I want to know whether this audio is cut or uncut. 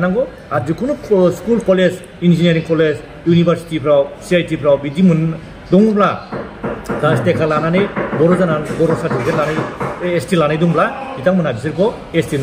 uncut